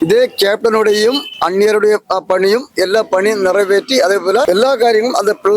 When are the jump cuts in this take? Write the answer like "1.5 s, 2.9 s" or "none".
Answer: 4.5 s